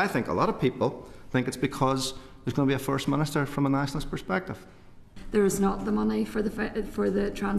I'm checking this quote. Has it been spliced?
yes; 1 cut; at 5.1 s

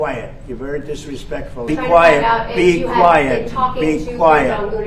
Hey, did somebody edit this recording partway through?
yes; 1 cut; at 1.7 s

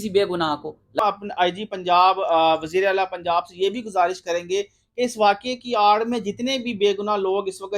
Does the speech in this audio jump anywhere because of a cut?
yes; 1 cut; at 1.0 s

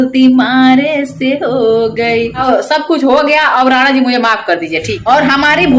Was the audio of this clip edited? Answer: yes; 1 cut; at 2.4 s

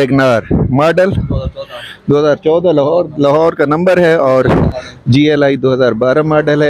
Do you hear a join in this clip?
yes; 1 cut; at 4.8 s

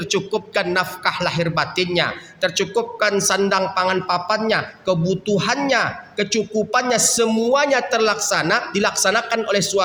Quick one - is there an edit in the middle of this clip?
no; 0 cuts

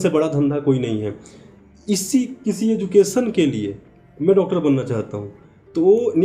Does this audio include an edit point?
no; 0 cuts

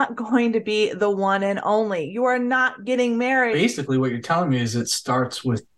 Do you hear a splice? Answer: yes; 1 cut; at 3.5 s

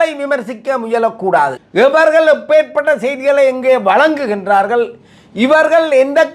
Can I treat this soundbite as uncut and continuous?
no; 1 cut; at 1.6 s

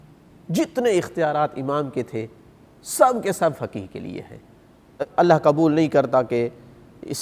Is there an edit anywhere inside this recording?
yes; 1 cut; at 5.0 s

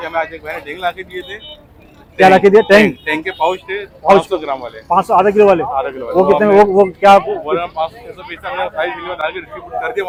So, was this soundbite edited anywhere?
no; 0 cuts

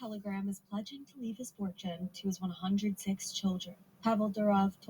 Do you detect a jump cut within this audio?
yes; 1 cut; at 1.0 s

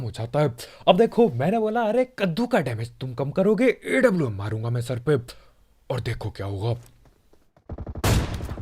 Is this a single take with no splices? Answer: no; 1 cut; at 7.6 s

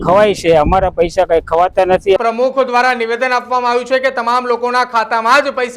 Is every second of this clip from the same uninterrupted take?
no; 1 cut; at 2.2 s

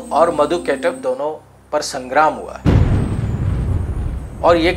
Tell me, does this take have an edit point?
no; 0 cuts

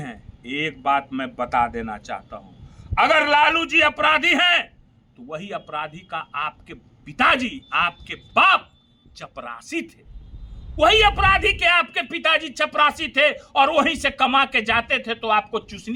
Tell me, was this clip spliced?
no; 0 cuts

